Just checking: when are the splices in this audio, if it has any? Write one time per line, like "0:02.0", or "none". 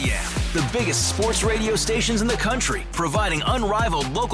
none

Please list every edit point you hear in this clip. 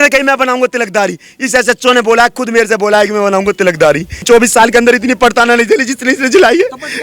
0:04.2

